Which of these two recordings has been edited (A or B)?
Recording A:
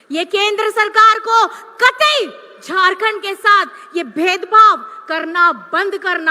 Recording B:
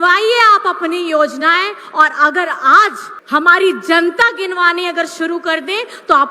B